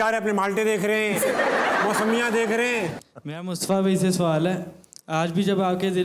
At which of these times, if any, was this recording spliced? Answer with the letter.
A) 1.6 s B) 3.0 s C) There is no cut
B